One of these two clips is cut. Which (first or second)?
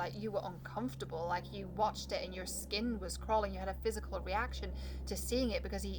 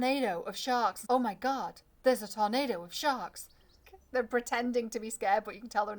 second